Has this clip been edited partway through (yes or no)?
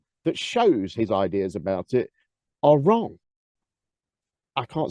no